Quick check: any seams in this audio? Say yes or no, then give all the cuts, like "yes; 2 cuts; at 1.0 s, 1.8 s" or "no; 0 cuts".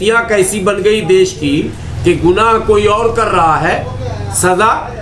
no; 0 cuts